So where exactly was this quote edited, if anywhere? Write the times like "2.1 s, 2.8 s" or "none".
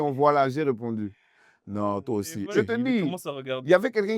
2.5 s